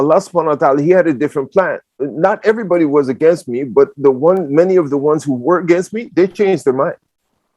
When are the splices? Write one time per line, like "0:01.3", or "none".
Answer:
0:02.1